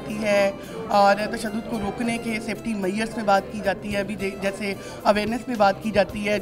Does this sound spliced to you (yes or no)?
no